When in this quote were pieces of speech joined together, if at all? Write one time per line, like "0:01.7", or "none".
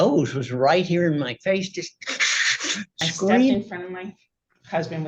0:03.6